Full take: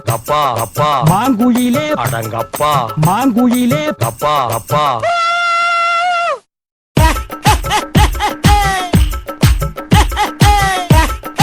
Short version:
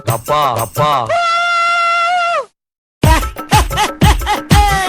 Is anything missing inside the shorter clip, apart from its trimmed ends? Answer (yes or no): yes